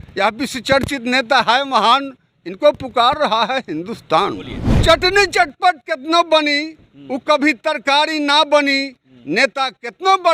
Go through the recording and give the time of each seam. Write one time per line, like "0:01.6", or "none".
0:04.7